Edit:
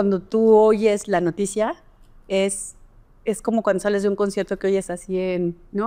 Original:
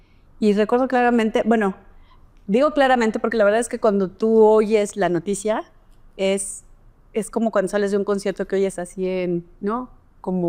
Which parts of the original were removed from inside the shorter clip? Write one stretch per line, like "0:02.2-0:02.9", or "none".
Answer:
none